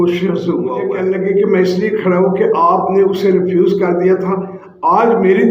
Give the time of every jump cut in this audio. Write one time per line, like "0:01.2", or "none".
0:00.9